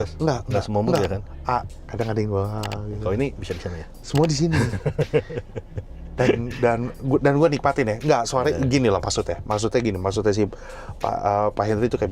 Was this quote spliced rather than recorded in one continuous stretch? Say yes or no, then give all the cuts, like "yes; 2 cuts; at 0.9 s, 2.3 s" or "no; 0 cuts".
no; 0 cuts